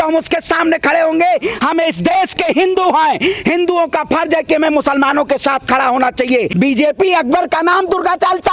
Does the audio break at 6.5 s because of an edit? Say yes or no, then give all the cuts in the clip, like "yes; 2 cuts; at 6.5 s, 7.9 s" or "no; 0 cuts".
yes; 1 cut; at 6.5 s